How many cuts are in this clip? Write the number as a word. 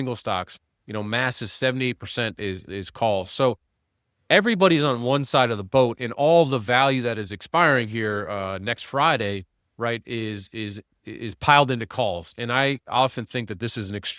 zero